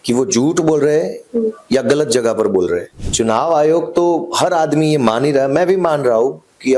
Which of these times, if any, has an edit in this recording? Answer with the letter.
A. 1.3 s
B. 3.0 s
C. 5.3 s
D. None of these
B